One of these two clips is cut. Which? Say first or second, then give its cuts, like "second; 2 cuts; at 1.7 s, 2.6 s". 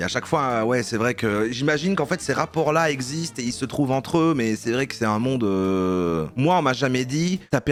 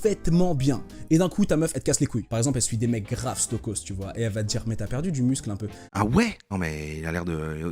second; 2 cuts; at 2.2 s, 5.9 s